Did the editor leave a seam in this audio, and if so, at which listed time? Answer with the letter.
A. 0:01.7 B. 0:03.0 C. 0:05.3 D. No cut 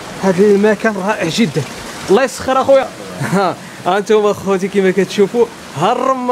B